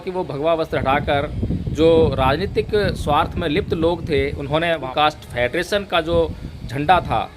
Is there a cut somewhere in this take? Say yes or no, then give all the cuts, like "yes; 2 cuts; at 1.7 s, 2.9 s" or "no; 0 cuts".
yes; 1 cut; at 4.9 s